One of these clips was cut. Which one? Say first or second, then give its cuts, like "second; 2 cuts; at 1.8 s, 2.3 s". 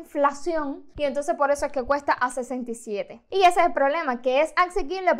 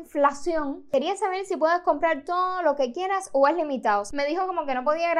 second; 2 cuts; at 0.9 s, 4.1 s